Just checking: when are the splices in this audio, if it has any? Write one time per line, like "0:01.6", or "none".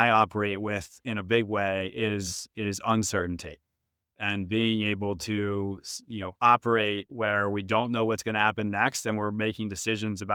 none